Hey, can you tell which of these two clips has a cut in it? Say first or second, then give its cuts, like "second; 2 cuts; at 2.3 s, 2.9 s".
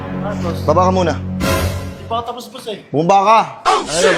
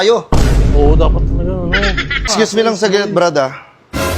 second; 1 cut; at 2.3 s